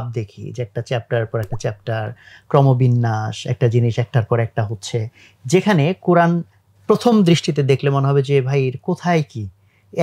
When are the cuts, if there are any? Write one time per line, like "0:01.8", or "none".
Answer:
none